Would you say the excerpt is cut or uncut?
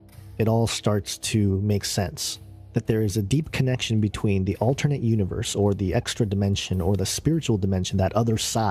uncut